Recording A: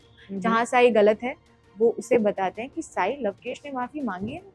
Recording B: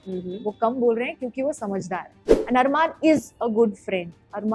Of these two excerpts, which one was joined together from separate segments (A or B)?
B